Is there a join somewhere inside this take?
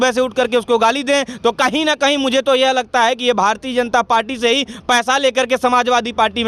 no; 0 cuts

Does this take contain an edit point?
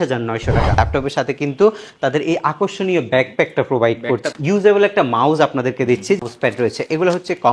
yes; 3 cuts; at 0.8 s, 4.2 s, 6.2 s

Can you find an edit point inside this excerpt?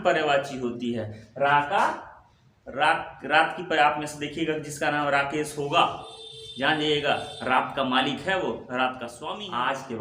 yes; 1 cut; at 9.1 s

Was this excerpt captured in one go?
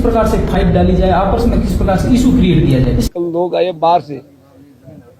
no; 1 cut; at 3.1 s

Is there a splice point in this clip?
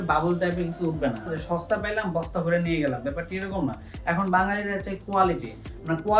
yes; 1 cut; at 1.2 s

